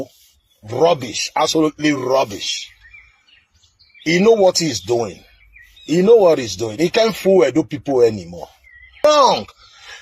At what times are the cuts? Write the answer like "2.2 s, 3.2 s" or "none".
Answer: 9.0 s